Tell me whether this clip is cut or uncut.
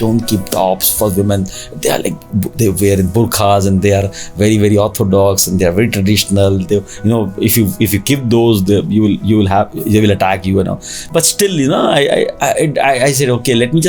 uncut